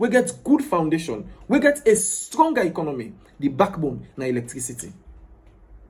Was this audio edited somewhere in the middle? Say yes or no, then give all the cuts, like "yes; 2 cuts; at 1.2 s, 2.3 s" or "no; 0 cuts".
no; 0 cuts